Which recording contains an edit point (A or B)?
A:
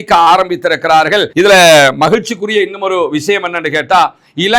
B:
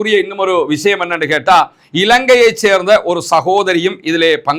A